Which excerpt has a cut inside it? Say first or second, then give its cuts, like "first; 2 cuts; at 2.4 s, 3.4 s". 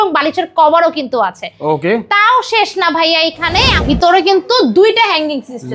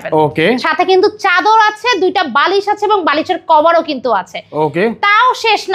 first; 1 cut; at 3.8 s